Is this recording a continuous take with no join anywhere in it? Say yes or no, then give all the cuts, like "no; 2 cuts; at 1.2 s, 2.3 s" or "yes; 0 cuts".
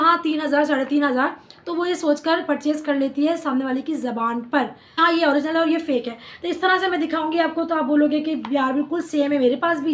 no; 1 cut; at 5.0 s